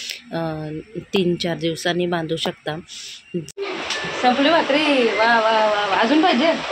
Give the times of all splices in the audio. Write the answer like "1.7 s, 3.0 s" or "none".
3.5 s